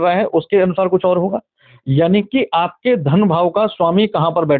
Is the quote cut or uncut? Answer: uncut